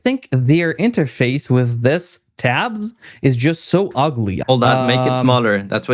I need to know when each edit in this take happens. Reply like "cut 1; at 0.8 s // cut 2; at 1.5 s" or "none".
cut 1; at 4.4 s